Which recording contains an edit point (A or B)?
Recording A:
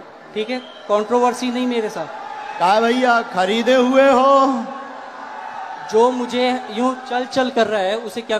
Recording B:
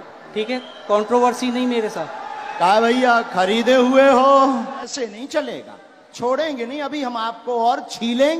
B